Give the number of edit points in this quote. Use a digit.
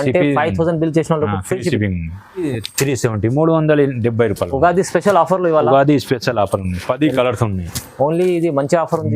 1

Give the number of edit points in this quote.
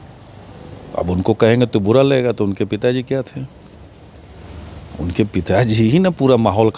1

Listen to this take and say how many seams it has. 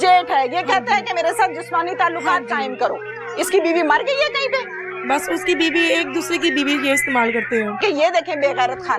1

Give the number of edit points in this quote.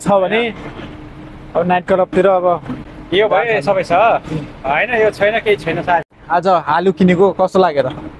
1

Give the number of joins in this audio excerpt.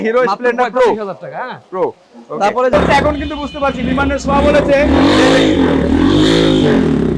1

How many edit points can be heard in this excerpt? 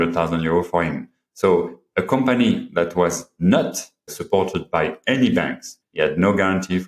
1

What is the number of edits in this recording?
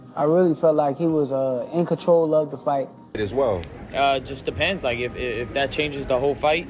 1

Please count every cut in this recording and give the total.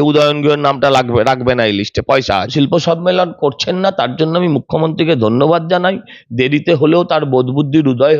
1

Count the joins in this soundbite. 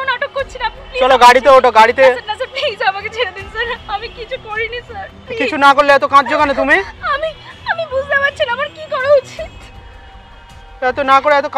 0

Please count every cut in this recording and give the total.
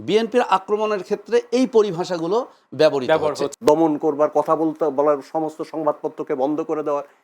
1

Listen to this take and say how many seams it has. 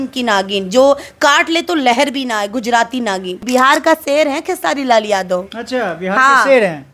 1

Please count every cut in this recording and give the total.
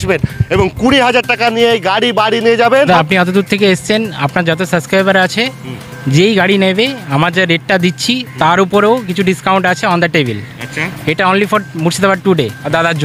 1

